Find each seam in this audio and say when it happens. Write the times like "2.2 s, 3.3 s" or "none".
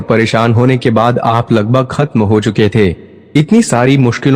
none